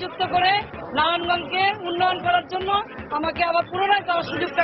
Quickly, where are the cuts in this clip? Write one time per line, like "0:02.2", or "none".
none